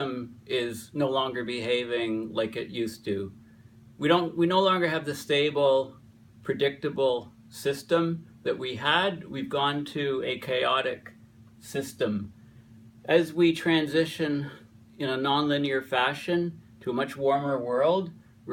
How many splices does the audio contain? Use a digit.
1